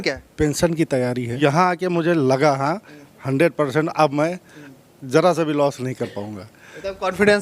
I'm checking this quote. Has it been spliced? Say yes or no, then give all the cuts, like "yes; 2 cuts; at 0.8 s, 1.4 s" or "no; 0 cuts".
yes; 1 cut; at 1.4 s